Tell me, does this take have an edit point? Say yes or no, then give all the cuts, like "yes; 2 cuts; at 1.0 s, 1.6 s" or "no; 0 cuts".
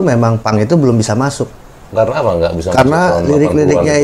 yes; 1 cut; at 1.8 s